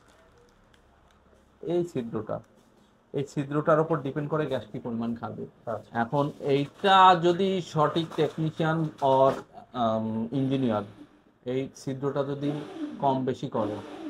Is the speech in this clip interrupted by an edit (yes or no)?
no